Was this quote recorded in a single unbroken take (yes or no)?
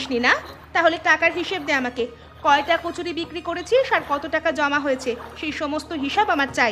yes